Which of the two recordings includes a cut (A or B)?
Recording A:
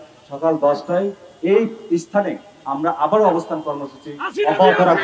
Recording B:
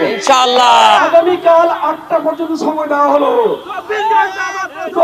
B